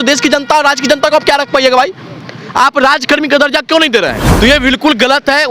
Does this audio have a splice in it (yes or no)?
yes